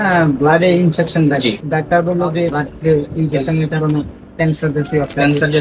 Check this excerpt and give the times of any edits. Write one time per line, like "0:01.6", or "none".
0:01.6
0:02.6